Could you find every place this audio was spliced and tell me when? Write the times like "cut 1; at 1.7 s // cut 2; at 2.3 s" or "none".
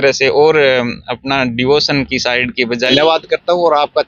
cut 1; at 2.9 s

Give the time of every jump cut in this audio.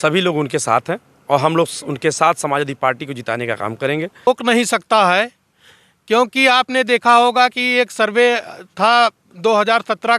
cut 1; at 4.3 s

